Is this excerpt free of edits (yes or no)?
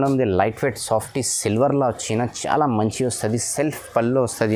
yes